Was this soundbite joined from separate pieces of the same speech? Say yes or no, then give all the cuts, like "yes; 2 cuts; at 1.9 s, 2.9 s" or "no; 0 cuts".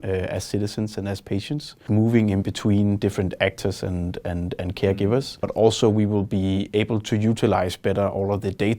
yes; 2 cuts; at 1.8 s, 5.5 s